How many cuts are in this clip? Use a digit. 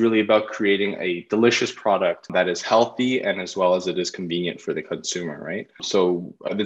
2